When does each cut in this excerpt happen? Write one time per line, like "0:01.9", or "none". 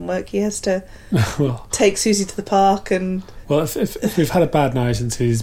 0:03.3